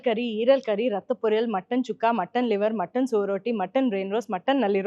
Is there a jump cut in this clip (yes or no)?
no